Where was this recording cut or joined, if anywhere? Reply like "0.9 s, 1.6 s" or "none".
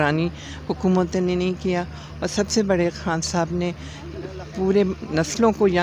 none

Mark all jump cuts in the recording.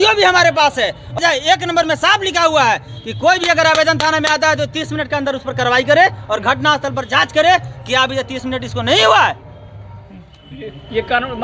1.2 s

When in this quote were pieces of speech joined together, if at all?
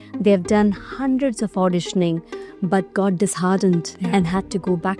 none

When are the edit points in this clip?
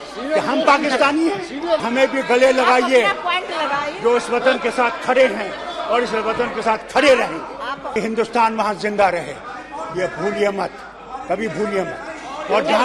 1.8 s, 8.0 s

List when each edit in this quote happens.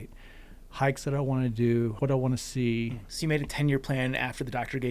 1.9 s, 3.0 s

